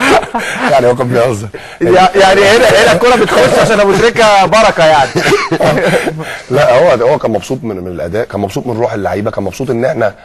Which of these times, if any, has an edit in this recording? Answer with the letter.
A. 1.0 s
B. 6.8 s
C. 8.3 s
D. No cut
A